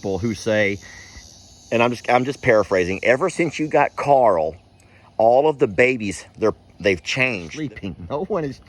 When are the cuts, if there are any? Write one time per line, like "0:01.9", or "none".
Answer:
0:07.5